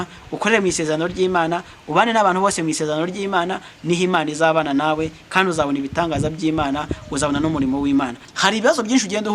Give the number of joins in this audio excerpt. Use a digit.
1